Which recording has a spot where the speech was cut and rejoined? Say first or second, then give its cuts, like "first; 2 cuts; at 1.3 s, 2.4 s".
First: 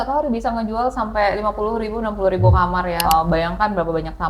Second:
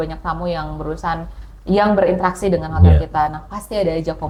first; 1 cut; at 3.0 s